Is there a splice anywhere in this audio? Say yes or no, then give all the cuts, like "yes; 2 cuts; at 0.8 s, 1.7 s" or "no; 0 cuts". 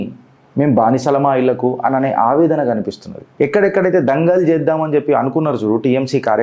yes; 1 cut; at 3.2 s